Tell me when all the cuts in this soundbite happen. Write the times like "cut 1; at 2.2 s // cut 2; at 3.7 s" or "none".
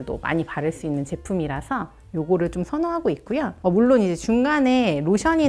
none